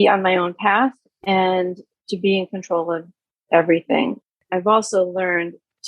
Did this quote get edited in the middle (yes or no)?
yes